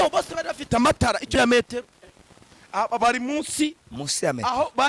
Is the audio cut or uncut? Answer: cut